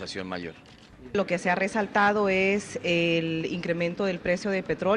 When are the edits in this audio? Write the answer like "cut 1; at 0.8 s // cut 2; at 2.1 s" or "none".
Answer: cut 1; at 3.9 s